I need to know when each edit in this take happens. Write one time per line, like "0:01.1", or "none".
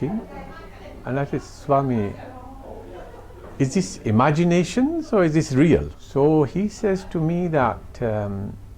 0:06.0